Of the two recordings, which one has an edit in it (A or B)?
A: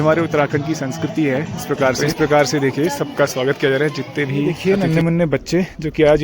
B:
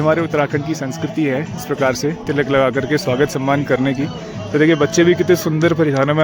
A